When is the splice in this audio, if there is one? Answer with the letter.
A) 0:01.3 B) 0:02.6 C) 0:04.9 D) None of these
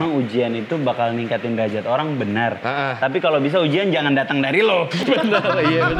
C